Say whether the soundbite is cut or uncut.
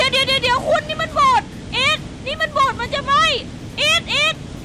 uncut